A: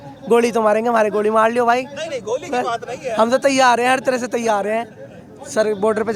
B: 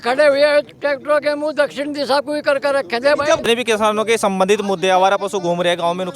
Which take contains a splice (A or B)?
B